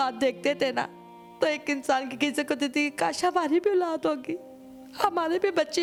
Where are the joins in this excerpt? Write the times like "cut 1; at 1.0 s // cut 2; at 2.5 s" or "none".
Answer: none